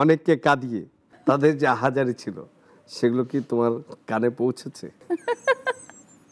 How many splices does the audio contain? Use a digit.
2